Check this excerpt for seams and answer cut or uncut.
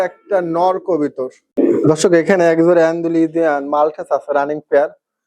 cut